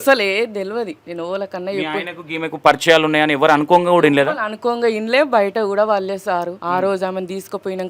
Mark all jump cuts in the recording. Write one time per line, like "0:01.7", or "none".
0:01.0
0:06.6